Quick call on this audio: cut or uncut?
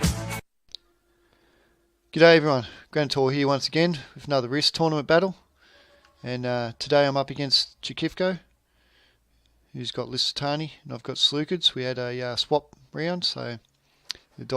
uncut